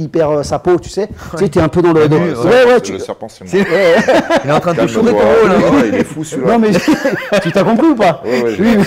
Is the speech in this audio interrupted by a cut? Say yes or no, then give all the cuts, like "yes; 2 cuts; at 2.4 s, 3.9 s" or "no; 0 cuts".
no; 0 cuts